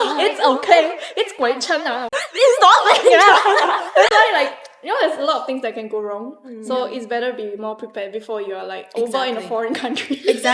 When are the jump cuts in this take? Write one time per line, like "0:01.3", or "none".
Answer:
none